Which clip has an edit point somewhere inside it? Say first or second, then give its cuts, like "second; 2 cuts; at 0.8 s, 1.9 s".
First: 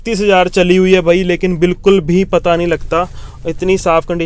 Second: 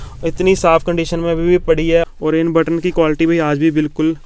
second; 1 cut; at 2.0 s